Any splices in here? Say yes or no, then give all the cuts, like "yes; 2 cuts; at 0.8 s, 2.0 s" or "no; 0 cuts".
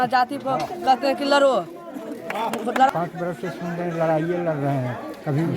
yes; 1 cut; at 2.9 s